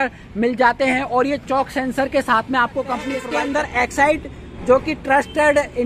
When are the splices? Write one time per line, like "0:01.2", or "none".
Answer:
0:03.2